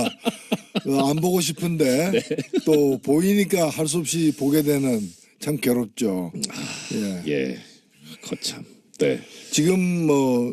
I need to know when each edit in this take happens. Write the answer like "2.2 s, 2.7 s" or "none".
5.0 s